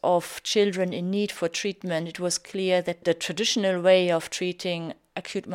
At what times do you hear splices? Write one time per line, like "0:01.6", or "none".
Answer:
0:03.0